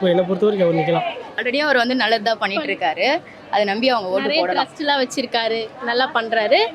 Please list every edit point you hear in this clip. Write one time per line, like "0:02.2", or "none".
0:01.3